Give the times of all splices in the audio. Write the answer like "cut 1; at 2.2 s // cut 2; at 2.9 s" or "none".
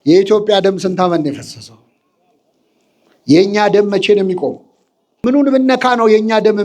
cut 1; at 5.2 s